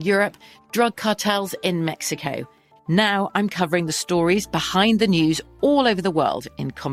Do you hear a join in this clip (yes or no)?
no